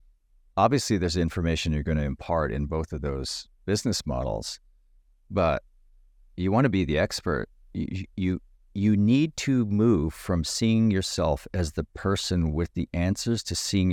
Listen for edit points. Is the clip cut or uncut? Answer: uncut